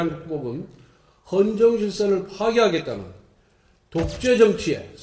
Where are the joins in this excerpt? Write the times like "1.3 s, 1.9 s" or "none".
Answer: none